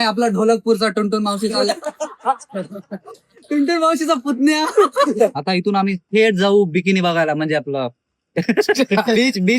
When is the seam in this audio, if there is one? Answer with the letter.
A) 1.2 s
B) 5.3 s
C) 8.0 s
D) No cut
B